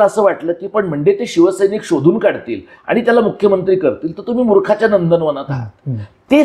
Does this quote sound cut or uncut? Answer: uncut